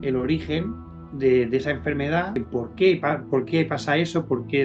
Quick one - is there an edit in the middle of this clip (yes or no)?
yes